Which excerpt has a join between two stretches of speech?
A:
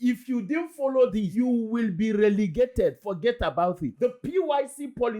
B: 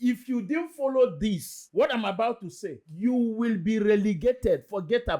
A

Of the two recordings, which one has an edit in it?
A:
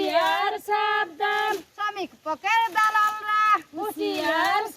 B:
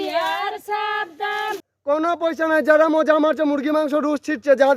B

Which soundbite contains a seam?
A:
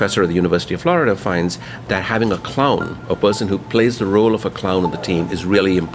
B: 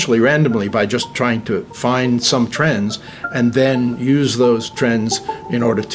B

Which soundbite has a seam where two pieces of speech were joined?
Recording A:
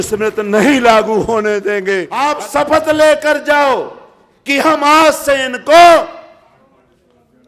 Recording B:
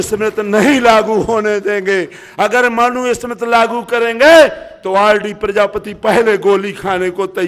A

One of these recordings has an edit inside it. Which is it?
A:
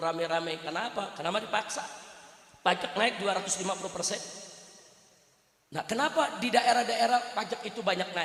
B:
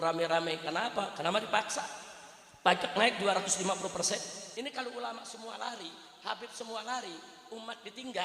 B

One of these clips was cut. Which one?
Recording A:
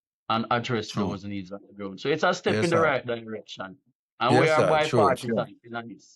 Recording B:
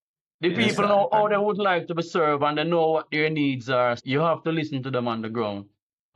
B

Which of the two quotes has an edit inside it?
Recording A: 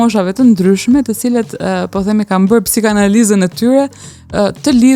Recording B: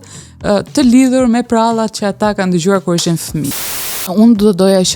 B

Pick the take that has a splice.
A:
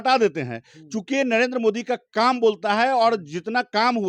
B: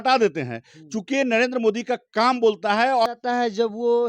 B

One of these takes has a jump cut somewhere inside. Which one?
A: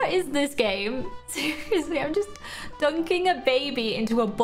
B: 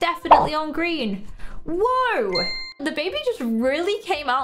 B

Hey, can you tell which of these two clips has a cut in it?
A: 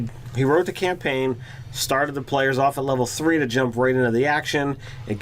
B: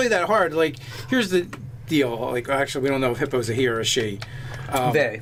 A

